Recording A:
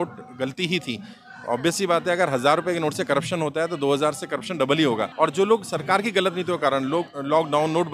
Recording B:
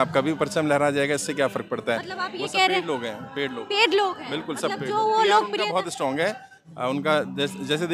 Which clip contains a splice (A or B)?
A